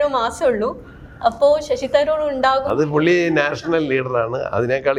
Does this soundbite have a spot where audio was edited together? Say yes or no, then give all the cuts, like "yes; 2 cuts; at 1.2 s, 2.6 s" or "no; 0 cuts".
no; 0 cuts